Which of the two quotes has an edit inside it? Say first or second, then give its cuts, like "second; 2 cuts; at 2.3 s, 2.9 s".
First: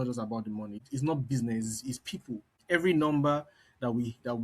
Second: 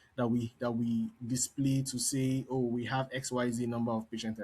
first; 2 cuts; at 0.8 s, 2.5 s